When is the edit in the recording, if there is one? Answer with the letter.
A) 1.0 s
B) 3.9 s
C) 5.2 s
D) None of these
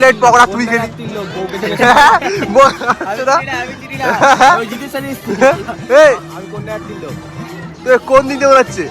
A